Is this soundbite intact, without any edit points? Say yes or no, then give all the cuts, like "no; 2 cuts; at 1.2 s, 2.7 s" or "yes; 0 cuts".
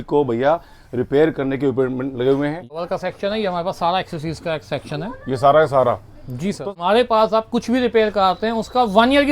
no; 2 cuts; at 2.7 s, 6.7 s